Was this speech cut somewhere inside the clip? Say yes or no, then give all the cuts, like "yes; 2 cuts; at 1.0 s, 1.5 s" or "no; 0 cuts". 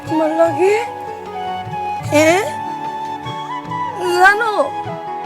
no; 0 cuts